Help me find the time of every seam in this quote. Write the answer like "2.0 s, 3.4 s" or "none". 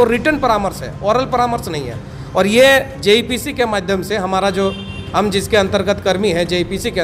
none